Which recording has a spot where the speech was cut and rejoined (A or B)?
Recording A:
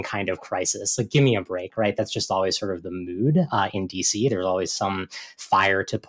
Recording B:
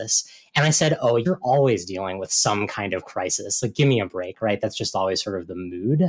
B